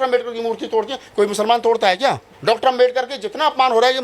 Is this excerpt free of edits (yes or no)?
no